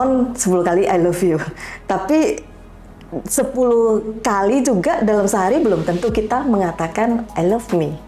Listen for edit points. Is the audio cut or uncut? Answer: uncut